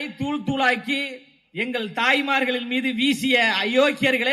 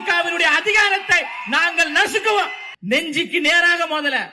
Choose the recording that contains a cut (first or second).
second